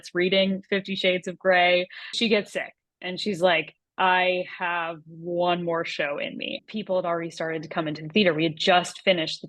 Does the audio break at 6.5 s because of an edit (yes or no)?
yes